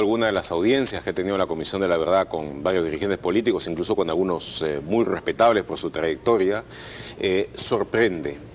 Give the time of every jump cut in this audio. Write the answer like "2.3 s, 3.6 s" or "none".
4.3 s